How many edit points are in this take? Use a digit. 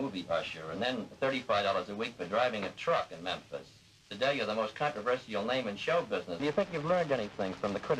1